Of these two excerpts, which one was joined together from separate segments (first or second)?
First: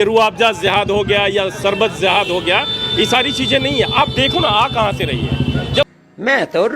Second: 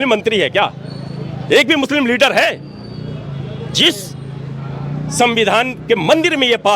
first